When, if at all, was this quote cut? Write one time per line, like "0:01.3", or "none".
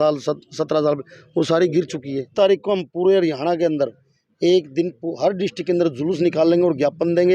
0:02.3